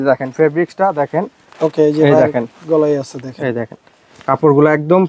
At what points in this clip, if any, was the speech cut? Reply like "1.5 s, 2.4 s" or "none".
none